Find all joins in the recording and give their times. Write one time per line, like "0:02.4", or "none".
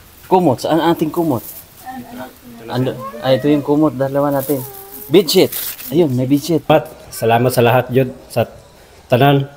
0:06.7